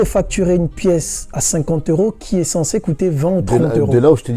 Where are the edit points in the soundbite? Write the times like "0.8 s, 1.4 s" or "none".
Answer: none

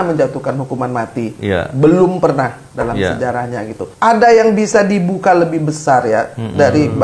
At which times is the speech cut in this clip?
3.8 s

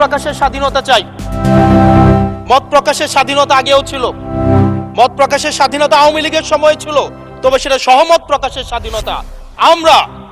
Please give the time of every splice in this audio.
none

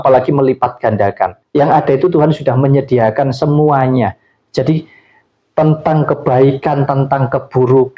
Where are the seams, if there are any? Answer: 1.4 s

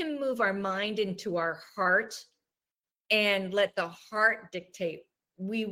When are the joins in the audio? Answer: none

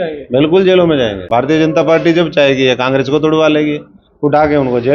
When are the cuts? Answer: 1.2 s

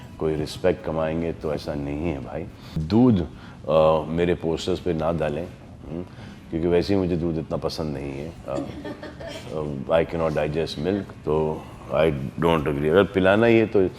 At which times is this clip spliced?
2.8 s

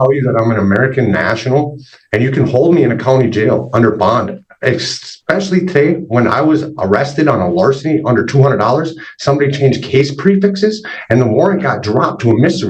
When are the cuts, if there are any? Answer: none

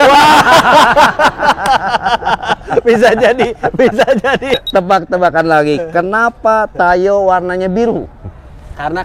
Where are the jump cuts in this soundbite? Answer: 4.5 s

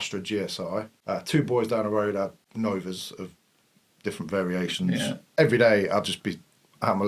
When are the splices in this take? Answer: 0.9 s, 2.4 s, 5.2 s

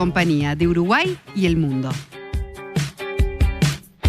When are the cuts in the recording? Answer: 1.9 s

